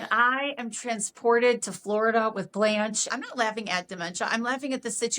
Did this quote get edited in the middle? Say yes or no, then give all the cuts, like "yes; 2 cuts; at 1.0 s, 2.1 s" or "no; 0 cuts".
yes; 1 cut; at 3.1 s